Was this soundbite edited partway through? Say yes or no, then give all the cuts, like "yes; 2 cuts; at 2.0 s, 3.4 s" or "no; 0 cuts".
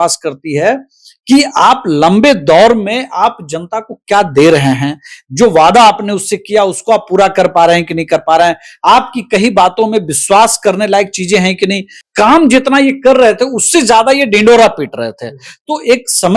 yes; 1 cut; at 12.0 s